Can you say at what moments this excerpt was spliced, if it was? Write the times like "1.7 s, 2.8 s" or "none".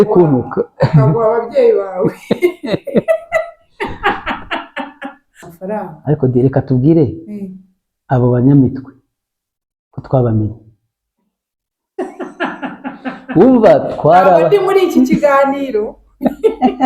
5.4 s